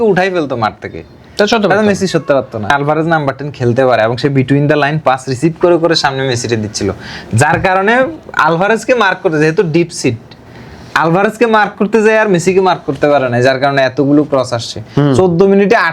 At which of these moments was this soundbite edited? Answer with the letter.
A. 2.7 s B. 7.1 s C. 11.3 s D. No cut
A